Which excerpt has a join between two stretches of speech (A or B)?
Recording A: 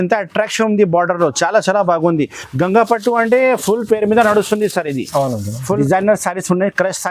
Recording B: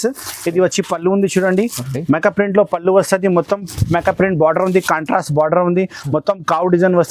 A